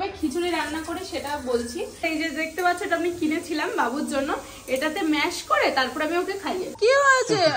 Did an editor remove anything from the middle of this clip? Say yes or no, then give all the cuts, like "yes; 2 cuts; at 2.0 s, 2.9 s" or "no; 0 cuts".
yes; 2 cuts; at 2.0 s, 6.7 s